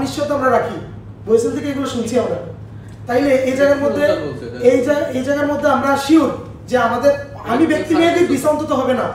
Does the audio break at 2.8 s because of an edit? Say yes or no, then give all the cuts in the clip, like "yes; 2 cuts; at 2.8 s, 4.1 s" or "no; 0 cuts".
no; 0 cuts